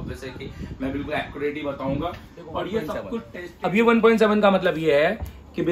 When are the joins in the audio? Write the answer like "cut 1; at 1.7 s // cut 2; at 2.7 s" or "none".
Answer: cut 1; at 3.4 s